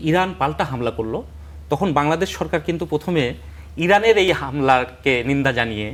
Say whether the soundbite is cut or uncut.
uncut